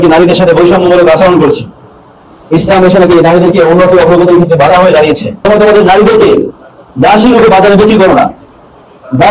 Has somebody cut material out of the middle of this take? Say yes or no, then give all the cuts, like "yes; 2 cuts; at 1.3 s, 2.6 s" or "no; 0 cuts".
yes; 1 cut; at 5.3 s